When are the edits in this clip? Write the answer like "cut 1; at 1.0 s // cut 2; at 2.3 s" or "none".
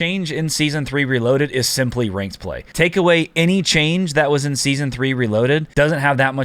cut 1; at 2.6 s // cut 2; at 5.7 s